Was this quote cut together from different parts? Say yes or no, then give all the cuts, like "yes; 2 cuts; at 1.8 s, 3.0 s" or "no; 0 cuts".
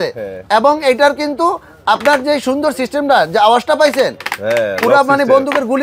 no; 0 cuts